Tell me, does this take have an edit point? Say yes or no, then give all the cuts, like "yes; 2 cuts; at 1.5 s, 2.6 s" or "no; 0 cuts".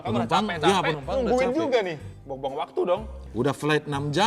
yes; 2 cuts; at 2.1 s, 3.2 s